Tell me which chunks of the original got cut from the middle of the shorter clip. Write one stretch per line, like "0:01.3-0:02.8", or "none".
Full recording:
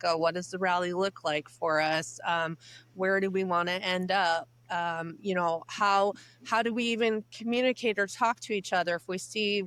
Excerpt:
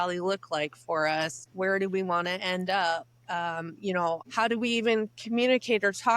0:02.1-0:02.8
0:05.7-0:06.4